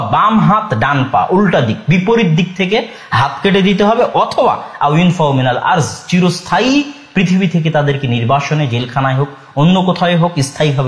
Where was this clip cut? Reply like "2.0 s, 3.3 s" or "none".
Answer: none